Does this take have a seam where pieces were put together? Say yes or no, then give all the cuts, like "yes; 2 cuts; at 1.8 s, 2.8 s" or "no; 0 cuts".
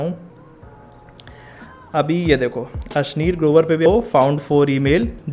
yes; 1 cut; at 3.9 s